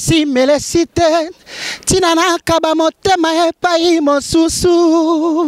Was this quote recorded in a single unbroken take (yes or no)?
yes